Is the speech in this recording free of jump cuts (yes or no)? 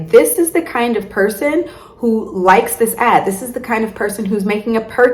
yes